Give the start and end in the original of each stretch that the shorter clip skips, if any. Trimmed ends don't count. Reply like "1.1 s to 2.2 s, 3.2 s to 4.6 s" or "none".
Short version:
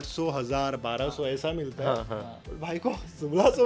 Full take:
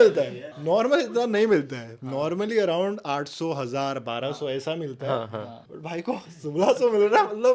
none